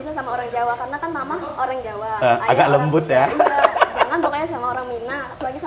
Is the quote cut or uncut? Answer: uncut